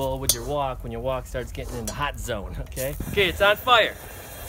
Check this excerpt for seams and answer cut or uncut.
cut